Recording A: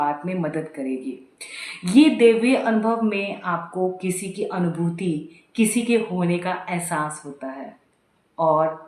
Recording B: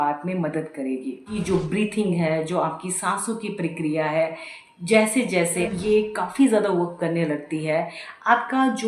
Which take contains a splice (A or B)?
B